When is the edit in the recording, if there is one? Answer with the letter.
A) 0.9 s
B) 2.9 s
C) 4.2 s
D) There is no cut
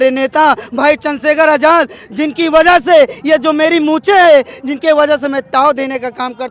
D